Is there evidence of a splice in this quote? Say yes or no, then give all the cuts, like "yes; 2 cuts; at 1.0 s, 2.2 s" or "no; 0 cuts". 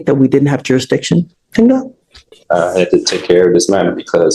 no; 0 cuts